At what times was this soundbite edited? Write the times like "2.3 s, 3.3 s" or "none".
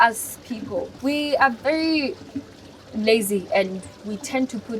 0.9 s